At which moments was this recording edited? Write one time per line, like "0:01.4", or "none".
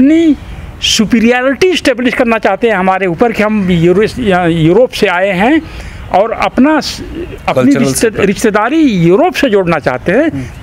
none